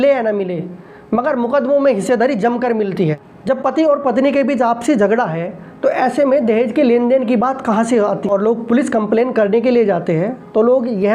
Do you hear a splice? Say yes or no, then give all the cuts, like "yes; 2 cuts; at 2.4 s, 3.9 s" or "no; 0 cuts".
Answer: yes; 2 cuts; at 2.9 s, 8.3 s